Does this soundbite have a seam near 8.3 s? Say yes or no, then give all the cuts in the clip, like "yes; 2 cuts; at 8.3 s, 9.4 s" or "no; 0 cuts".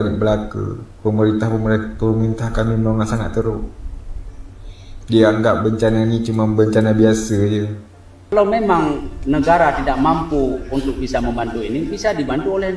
yes; 1 cut; at 8.3 s